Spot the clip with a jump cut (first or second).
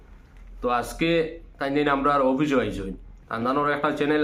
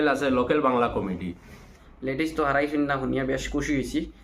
second